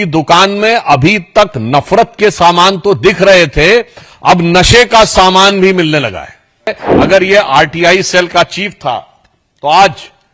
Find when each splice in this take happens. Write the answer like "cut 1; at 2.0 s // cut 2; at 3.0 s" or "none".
cut 1; at 6.8 s